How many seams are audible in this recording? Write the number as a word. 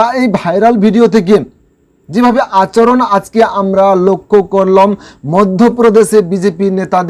zero